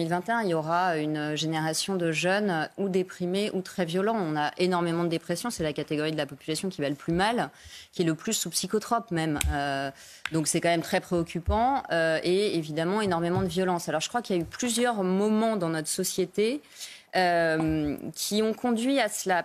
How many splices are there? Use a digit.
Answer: 0